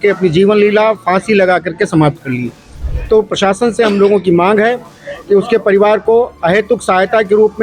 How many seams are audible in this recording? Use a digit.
1